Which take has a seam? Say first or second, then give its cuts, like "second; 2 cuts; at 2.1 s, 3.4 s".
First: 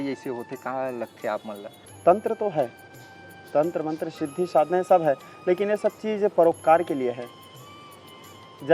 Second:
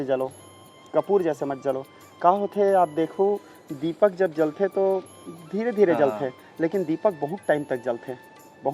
first; 1 cut; at 1.7 s